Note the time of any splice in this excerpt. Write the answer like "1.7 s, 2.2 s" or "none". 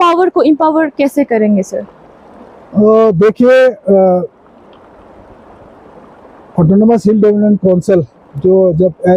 none